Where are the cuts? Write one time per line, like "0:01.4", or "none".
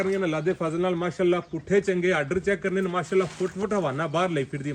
none